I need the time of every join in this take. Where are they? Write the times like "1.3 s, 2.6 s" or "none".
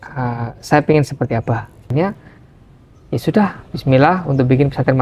1.9 s